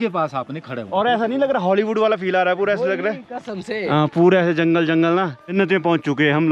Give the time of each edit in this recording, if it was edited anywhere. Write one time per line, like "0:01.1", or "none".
0:00.8
0:05.5